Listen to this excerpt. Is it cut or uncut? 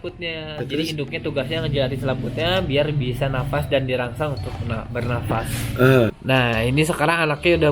cut